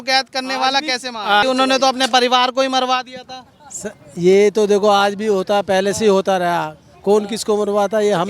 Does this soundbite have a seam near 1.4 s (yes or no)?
yes